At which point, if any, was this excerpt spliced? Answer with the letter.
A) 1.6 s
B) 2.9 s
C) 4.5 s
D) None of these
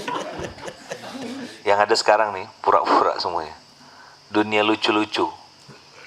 A